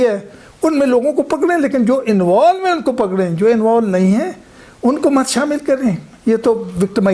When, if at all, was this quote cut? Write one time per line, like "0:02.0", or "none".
none